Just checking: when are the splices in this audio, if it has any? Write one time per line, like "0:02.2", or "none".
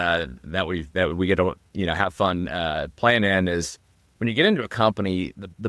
none